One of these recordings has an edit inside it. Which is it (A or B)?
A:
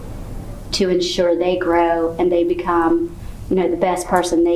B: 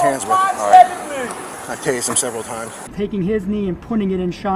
B